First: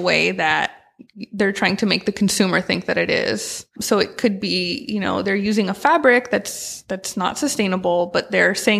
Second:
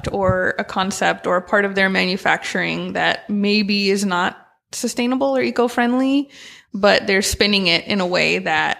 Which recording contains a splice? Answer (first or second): first